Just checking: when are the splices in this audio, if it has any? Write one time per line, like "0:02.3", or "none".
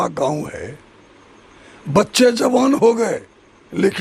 none

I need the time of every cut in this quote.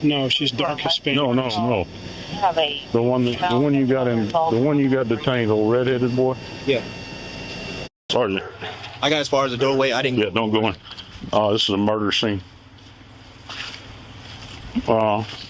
0:08.1

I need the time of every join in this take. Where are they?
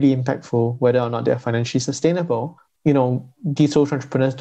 0:02.6

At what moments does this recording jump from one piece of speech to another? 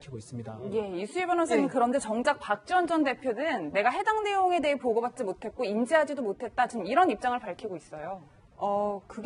0:02.0

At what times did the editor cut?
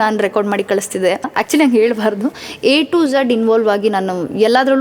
0:01.3
0:02.5

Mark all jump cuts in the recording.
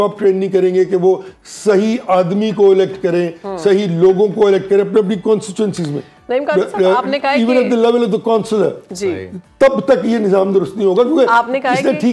none

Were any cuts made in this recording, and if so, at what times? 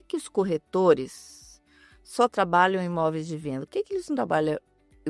none

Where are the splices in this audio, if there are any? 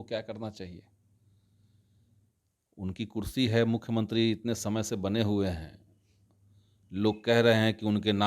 none

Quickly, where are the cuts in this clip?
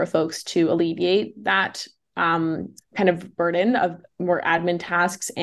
none

